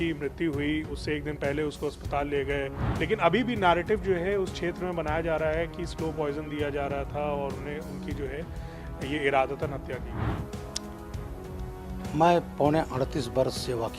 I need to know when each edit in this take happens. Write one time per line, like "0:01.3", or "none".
0:02.9